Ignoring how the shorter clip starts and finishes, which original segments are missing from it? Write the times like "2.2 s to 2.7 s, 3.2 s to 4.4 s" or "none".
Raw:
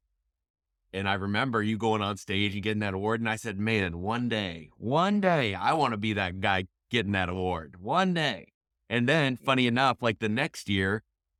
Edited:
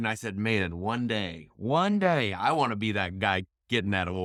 none